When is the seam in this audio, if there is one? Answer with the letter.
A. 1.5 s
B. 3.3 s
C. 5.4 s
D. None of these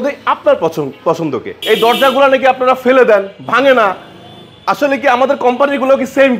A